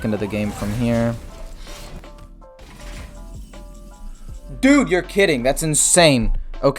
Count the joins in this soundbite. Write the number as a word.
one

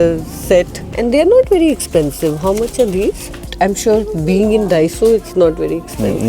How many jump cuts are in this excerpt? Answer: two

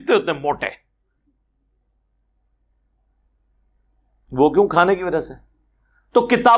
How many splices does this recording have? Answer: zero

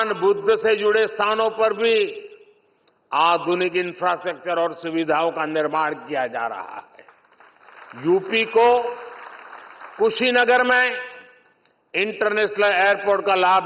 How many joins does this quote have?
zero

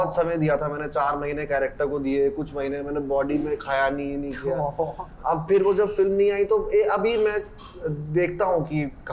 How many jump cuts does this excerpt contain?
zero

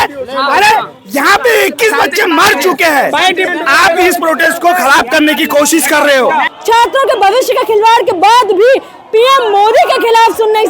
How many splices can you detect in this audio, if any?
two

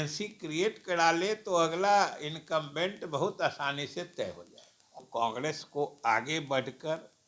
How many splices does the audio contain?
one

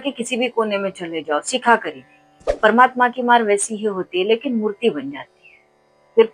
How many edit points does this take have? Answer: one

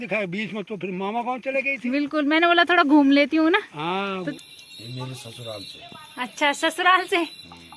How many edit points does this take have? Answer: one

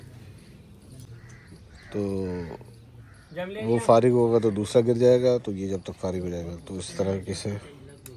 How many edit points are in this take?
zero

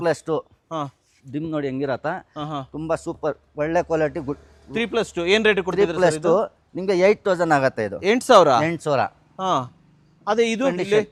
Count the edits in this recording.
zero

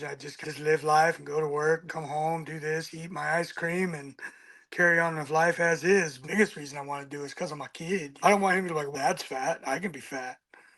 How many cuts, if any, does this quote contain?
three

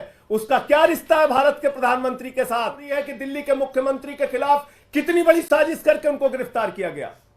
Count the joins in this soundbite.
one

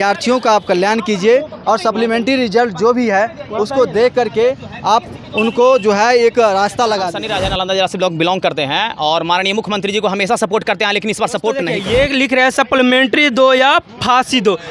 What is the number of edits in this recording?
two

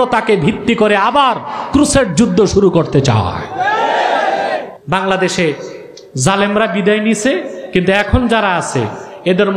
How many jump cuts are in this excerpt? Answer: one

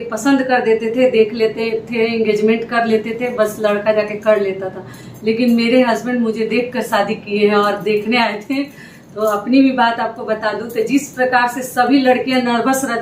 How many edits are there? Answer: zero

